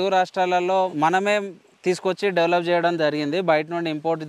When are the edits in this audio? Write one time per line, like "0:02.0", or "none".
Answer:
0:00.9